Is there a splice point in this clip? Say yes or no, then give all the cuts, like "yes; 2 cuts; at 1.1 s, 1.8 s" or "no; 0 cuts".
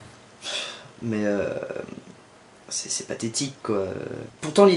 yes; 1 cut; at 1.7 s